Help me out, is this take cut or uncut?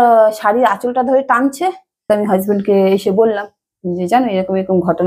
cut